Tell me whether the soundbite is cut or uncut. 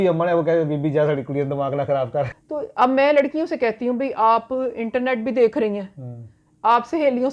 cut